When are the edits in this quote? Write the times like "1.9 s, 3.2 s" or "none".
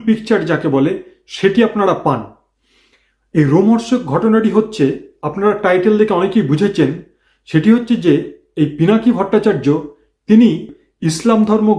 10.8 s